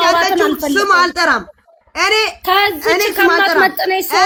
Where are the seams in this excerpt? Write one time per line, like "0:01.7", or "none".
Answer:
none

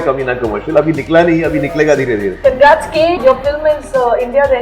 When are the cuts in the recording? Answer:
0:02.4
0:03.2

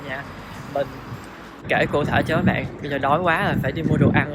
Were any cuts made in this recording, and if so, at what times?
none

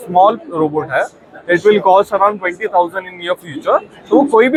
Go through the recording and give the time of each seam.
none

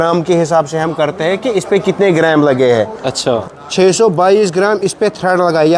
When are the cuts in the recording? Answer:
0:03.4

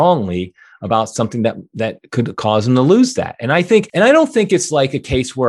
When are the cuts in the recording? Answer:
0:03.9

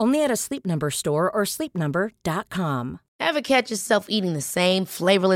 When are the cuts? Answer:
0:03.0

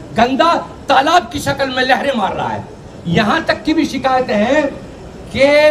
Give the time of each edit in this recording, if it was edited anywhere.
none

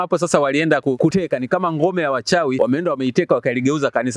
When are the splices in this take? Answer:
0:01.1
0:02.6

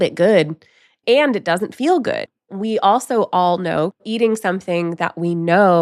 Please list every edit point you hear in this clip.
0:02.4
0:04.0

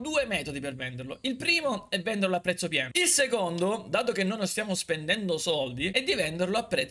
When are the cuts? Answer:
0:02.8

